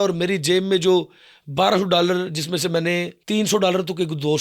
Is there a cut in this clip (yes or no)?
yes